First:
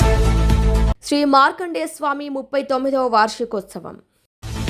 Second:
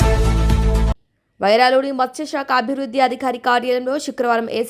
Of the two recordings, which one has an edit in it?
second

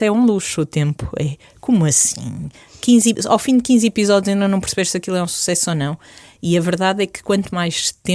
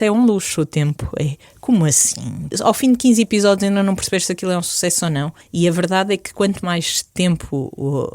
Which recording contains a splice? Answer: second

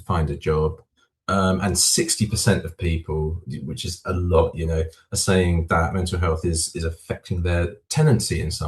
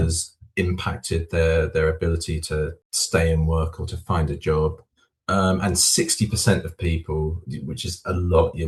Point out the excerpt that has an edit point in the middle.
first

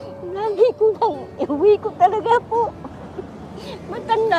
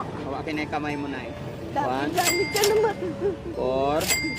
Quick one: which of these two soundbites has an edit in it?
second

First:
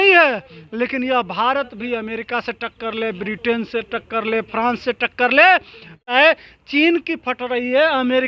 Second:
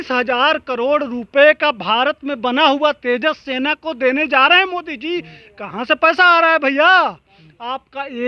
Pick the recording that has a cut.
first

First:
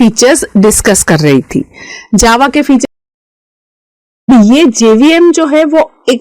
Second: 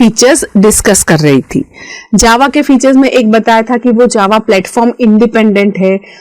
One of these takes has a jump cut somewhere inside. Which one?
second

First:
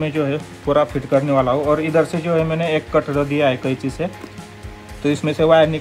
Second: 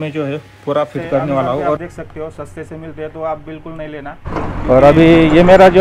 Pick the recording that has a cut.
second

